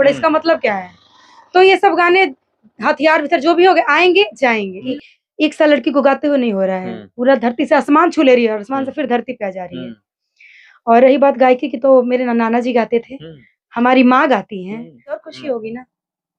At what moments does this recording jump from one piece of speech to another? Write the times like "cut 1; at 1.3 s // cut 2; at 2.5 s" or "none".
cut 1; at 4.9 s // cut 2; at 15.3 s

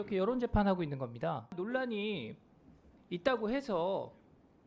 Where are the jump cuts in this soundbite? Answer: cut 1; at 1.5 s

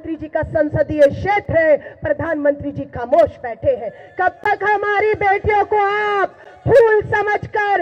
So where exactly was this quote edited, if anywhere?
none

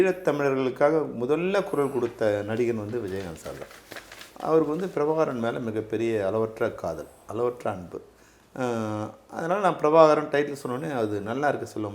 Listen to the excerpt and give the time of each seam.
none

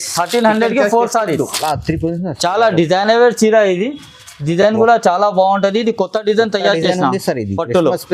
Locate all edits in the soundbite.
cut 1; at 1.6 s

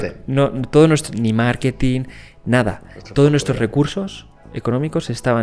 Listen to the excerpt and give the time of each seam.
none

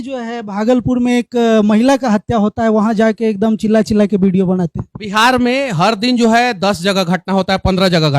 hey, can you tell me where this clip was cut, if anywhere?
none

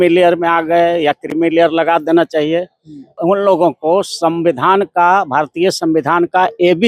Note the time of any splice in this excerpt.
cut 1; at 3.2 s

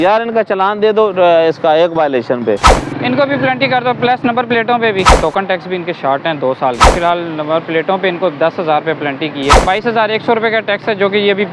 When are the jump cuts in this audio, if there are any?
cut 1; at 2.7 s // cut 2; at 5.2 s // cut 3; at 6.9 s // cut 4; at 9.6 s

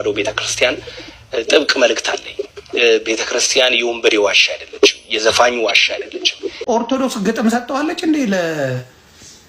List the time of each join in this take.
cut 1; at 6.5 s

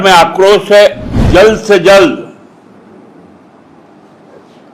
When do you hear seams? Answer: cut 1; at 1.3 s

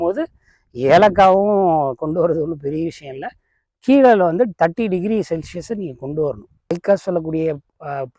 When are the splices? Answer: cut 1; at 6.7 s

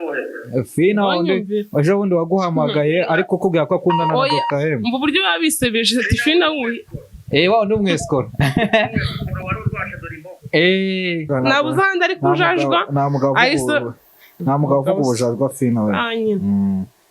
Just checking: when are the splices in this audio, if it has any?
cut 1; at 11.3 s

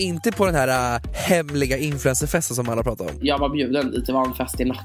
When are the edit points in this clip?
cut 1; at 1.1 s // cut 2; at 3.1 s

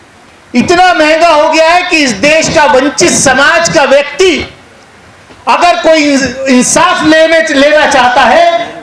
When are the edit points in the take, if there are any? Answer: none

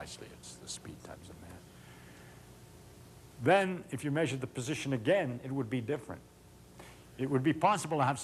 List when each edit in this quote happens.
cut 1; at 4.4 s

